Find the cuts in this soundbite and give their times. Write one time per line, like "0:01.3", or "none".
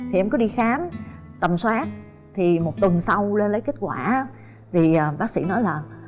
none